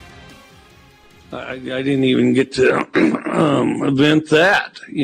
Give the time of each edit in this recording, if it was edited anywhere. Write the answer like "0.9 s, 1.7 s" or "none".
1.3 s